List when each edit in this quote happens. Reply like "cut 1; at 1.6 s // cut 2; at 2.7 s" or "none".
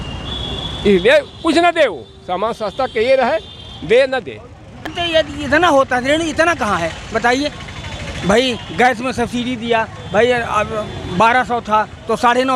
cut 1; at 5.0 s